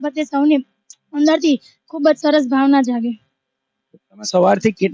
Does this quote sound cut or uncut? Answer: uncut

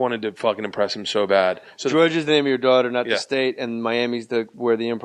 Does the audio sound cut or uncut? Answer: uncut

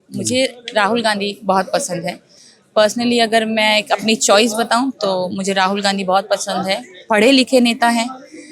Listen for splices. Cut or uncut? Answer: uncut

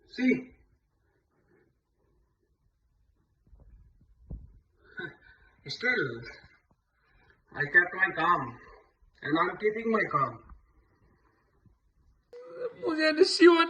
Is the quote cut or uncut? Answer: cut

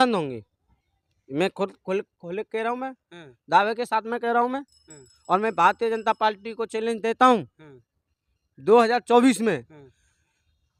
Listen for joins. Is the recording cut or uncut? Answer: uncut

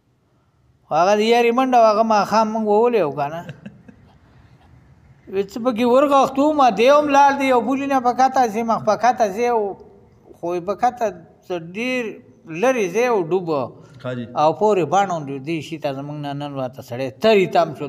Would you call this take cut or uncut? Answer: uncut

